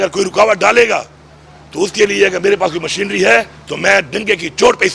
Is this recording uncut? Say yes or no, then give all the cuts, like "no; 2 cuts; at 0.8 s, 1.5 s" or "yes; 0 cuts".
yes; 0 cuts